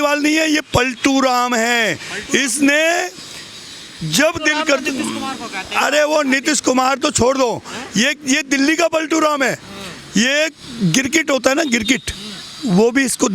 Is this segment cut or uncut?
uncut